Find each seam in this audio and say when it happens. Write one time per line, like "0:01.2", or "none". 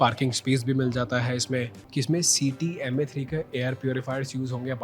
0:01.8